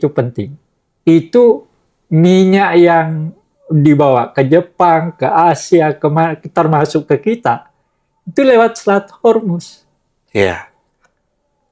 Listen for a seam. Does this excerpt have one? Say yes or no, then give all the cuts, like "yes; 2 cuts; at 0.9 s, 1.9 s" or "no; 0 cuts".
no; 0 cuts